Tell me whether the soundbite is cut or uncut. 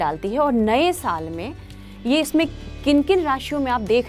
uncut